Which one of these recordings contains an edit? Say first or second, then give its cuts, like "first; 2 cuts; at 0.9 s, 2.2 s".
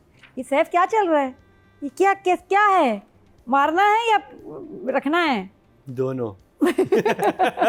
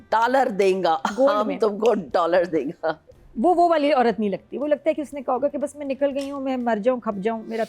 second; 1 cut; at 3.1 s